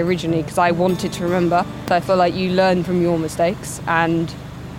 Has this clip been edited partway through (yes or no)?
no